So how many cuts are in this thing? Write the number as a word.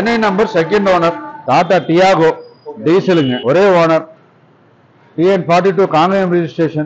two